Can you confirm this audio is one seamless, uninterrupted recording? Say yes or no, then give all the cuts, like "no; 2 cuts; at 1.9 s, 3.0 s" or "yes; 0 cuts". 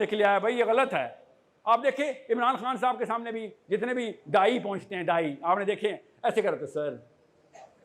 yes; 0 cuts